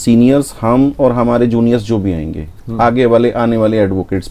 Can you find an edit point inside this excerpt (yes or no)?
no